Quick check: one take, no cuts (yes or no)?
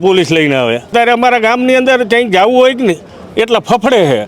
no